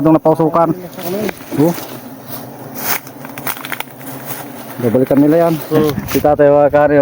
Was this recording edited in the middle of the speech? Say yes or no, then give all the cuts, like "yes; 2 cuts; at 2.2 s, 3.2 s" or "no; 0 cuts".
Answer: yes; 1 cut; at 5.6 s